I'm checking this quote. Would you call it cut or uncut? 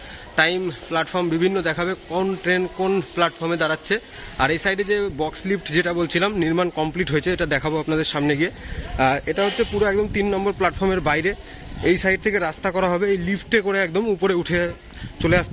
uncut